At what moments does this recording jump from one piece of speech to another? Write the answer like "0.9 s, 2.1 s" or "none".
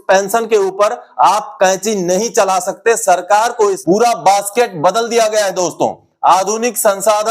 3.8 s